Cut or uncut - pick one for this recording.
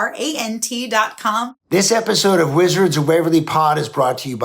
cut